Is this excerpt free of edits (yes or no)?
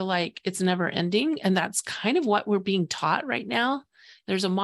yes